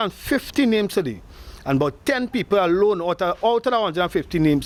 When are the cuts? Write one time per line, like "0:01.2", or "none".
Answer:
none